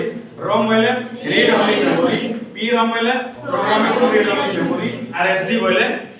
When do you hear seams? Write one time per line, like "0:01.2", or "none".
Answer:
0:05.1